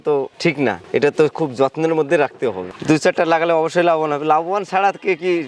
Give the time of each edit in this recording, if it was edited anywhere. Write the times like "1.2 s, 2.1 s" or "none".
none